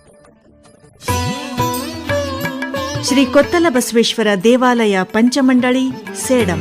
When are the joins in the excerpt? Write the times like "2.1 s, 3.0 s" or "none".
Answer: 1.0 s